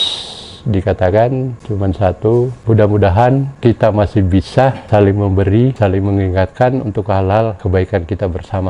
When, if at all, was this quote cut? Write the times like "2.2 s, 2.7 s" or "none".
1.6 s, 2.6 s, 3.5 s, 4.8 s, 5.7 s, 7.6 s